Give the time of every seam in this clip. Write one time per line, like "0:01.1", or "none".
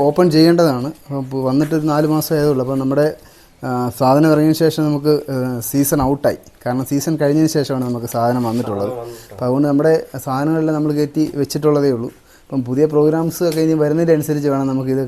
none